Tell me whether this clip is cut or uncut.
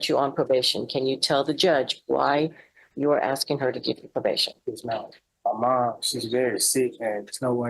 cut